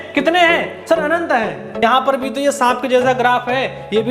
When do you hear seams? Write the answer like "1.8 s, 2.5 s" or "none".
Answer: 1.8 s